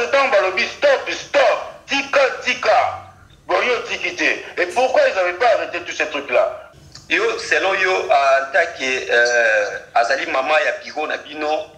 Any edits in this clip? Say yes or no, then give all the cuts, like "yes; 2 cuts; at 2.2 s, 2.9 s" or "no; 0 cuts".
yes; 1 cut; at 6.6 s